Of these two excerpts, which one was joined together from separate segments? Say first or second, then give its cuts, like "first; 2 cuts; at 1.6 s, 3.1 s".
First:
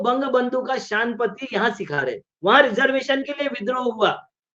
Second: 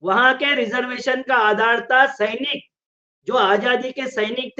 first; 1 cut; at 2.3 s